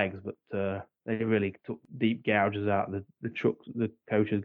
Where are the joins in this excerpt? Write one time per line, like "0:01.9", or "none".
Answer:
0:00.9
0:01.8

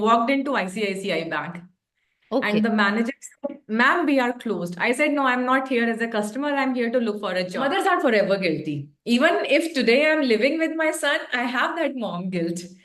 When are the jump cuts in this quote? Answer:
0:07.6

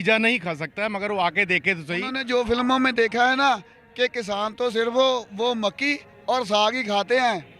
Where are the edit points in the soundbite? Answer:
0:02.1

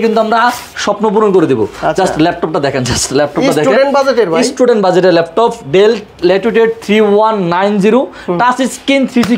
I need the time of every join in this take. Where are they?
none

